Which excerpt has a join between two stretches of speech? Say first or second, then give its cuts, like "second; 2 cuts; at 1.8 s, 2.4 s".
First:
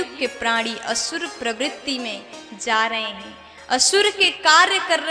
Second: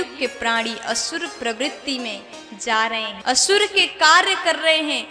second; 1 cut; at 3.1 s